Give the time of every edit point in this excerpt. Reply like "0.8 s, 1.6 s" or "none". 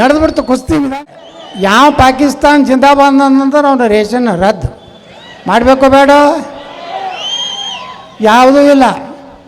1.1 s